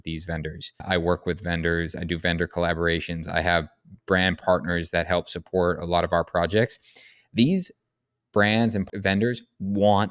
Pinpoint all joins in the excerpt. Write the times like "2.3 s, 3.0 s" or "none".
0.8 s, 4.4 s, 8.9 s